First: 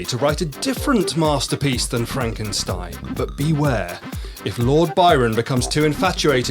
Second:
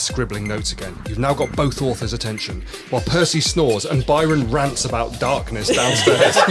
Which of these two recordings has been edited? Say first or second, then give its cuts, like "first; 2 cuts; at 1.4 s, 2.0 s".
first; 1 cut; at 3.1 s